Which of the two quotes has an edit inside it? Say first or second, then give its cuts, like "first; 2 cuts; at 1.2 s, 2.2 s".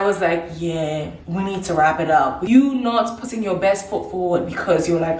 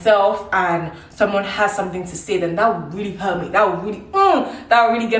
first; 2 cuts; at 1.2 s, 2.4 s